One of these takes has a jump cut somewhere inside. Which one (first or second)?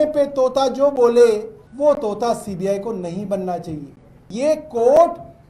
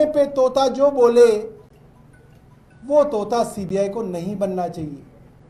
first